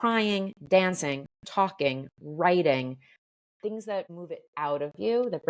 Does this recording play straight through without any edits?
no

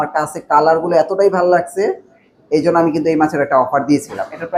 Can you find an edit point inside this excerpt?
no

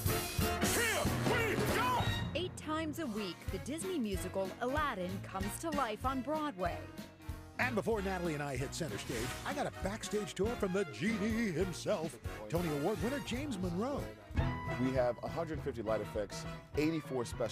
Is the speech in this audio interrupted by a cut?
no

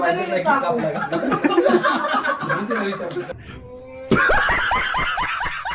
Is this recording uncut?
no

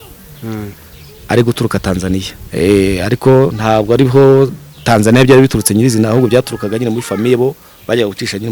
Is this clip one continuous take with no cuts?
no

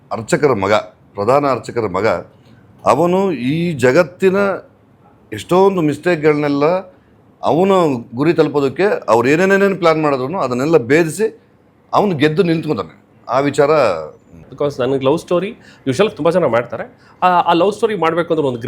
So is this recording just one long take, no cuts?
no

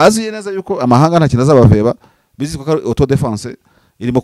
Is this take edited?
no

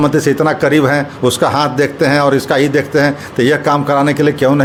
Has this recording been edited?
no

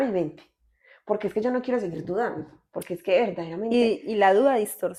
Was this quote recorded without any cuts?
yes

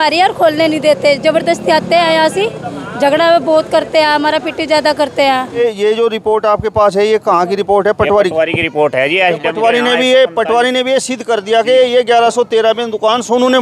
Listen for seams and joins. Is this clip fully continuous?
no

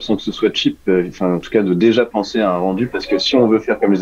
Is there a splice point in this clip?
no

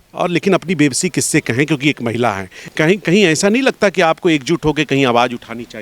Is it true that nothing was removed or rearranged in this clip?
no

